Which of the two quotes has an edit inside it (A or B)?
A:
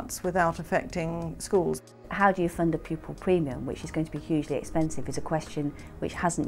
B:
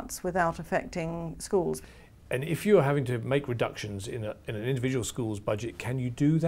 A